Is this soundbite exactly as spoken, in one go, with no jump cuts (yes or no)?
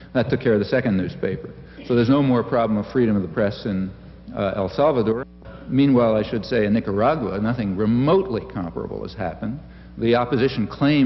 no